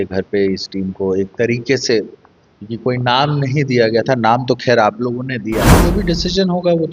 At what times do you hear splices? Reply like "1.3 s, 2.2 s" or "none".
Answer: 5.8 s